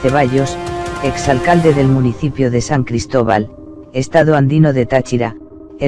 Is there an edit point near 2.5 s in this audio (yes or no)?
yes